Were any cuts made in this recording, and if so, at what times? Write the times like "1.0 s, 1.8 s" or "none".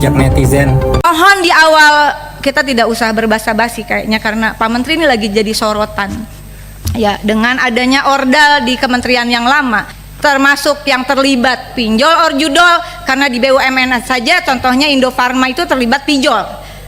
1.0 s, 9.9 s